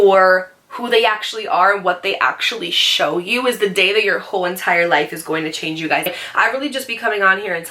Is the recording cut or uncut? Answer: cut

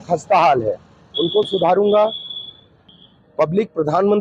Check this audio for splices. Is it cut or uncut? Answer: cut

